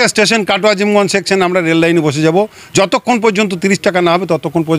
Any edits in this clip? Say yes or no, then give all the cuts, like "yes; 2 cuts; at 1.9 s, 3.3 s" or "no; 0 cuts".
no; 0 cuts